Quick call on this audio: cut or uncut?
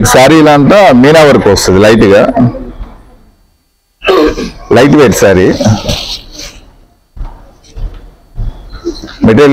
uncut